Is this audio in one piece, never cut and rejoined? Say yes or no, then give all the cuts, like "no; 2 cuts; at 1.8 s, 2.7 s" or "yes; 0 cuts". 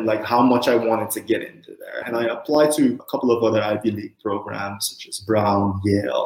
no; 2 cuts; at 2.0 s, 3.0 s